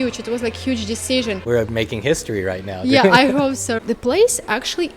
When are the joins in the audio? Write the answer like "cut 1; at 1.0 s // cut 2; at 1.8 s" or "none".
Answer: cut 1; at 1.5 s // cut 2; at 3.7 s